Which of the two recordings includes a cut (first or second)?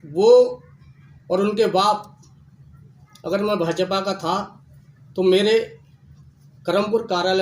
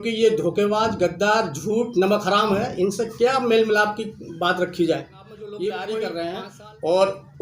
second